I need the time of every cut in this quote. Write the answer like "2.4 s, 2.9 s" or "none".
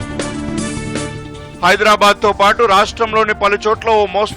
0.9 s